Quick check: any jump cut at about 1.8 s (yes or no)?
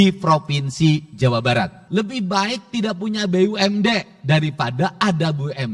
yes